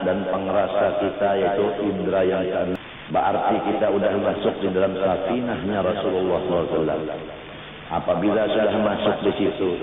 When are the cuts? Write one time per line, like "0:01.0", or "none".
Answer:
0:02.8

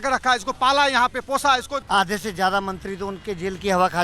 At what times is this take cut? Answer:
0:01.8

